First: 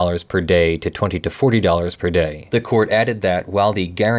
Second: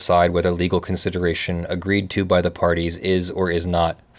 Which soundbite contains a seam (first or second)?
first